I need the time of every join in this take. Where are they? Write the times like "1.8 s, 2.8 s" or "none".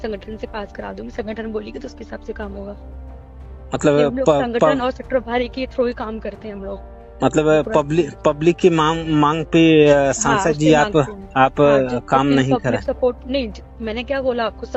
none